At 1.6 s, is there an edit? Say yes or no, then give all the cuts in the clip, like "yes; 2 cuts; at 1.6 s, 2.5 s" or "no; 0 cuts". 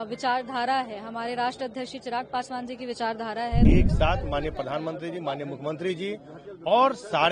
no; 1 cut; at 3.7 s